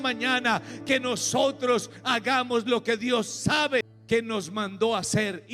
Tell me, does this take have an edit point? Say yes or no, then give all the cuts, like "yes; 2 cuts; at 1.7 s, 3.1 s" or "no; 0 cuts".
yes; 1 cut; at 3.9 s